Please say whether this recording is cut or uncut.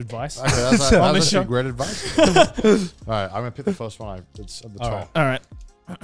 uncut